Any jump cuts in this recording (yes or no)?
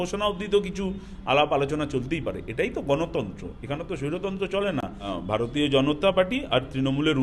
yes